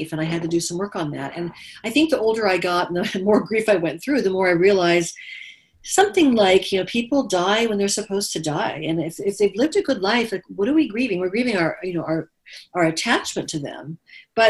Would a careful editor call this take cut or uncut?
uncut